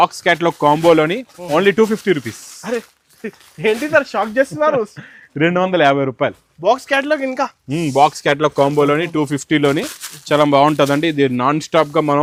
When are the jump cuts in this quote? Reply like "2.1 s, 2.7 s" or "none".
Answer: none